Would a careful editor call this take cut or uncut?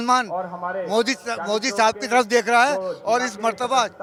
uncut